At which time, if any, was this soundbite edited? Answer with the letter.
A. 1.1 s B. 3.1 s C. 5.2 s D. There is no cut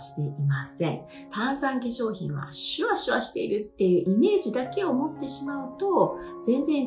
A